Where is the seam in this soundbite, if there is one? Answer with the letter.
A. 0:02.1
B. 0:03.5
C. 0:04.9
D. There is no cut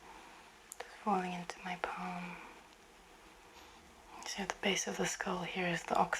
B